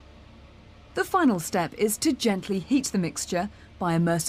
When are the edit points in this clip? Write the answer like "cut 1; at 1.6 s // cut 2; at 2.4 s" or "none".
cut 1; at 0.9 s